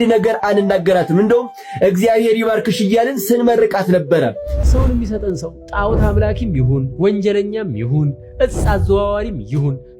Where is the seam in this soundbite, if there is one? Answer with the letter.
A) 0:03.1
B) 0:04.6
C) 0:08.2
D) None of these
B